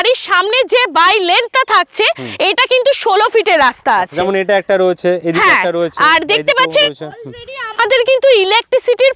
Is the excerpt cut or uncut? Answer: uncut